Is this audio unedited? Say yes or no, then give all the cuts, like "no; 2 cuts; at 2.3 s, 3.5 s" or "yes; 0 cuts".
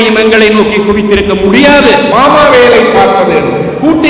no; 1 cut; at 2.1 s